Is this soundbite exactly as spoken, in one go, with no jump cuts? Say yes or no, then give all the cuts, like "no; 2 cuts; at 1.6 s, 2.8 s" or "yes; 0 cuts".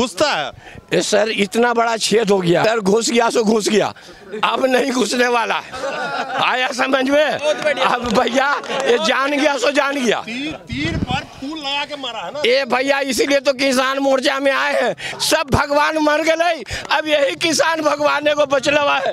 no; 2 cuts; at 2.6 s, 15.1 s